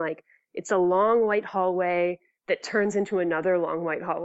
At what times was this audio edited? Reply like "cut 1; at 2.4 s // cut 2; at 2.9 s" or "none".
cut 1; at 2.3 s

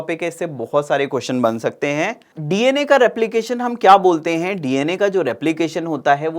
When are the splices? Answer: cut 1; at 2.3 s

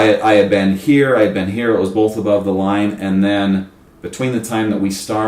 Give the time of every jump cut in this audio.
none

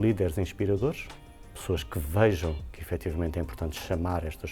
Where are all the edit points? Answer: none

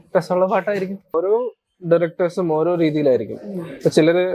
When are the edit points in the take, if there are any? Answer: cut 1; at 1.1 s

